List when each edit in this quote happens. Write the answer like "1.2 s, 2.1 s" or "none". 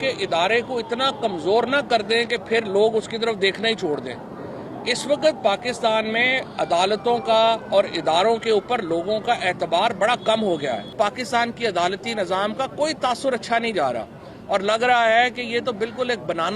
10.9 s

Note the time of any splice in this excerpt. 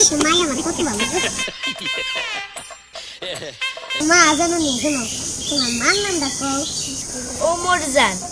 4.0 s

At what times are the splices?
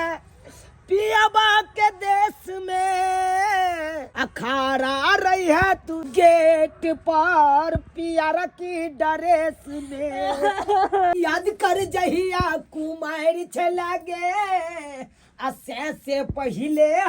4.1 s, 6.0 s, 11.1 s

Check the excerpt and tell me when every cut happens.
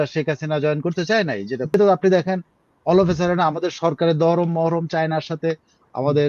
1.7 s

